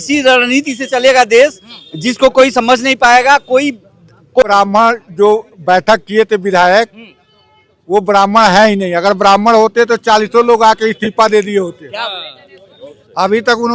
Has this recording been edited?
yes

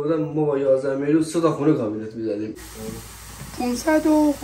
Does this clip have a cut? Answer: yes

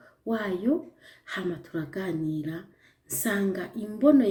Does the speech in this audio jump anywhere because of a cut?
no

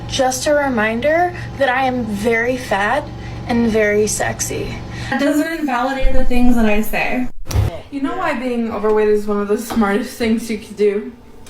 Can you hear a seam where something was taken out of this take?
yes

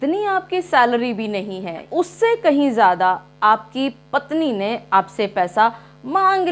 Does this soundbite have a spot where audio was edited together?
yes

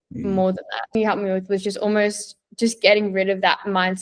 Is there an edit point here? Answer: yes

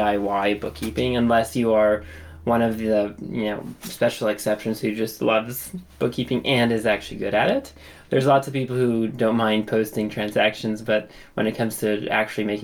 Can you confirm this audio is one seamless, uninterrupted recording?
yes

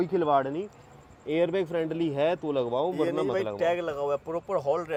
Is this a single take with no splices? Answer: yes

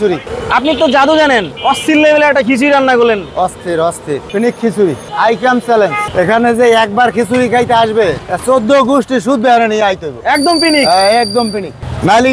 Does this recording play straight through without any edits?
no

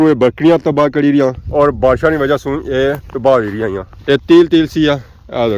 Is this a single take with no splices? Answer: yes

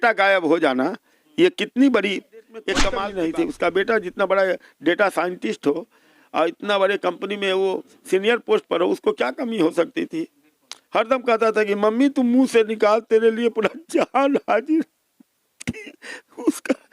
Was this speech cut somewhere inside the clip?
yes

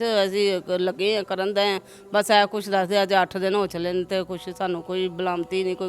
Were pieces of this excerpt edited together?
no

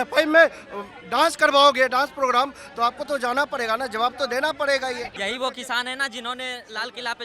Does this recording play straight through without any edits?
no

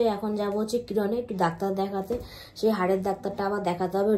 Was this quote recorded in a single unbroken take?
yes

